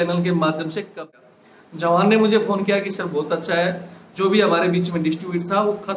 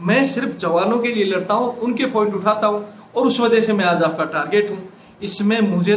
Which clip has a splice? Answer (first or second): first